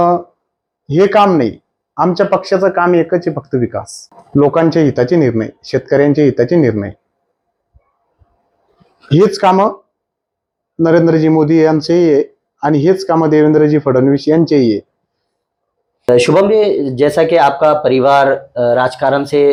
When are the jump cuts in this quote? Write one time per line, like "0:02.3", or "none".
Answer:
none

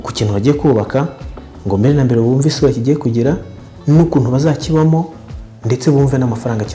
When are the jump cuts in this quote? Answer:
0:03.7

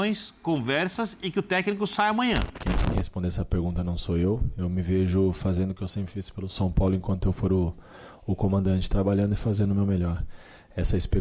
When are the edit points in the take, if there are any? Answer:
0:02.5

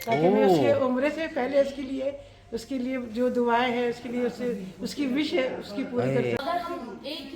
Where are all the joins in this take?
0:06.4

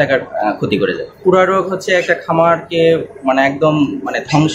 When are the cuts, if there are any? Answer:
0:01.2

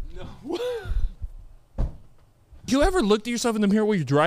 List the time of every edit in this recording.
0:02.7

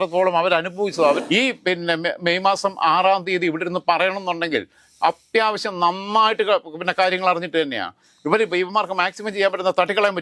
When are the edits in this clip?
0:01.2

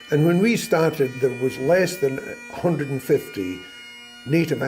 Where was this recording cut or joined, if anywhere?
0:01.1

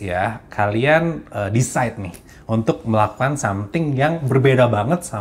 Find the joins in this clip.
none

